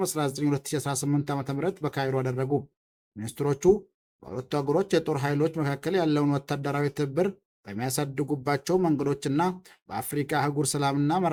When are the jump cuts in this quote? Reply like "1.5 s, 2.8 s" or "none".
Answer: none